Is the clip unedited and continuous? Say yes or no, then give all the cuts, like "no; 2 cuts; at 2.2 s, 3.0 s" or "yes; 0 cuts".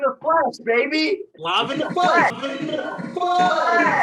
yes; 0 cuts